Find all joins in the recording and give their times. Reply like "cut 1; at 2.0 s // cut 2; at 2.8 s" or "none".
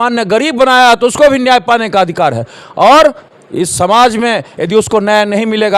none